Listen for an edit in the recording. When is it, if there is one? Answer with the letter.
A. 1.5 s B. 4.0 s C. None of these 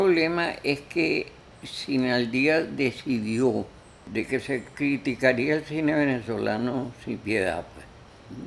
B